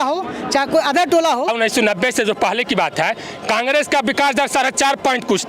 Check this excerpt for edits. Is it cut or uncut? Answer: cut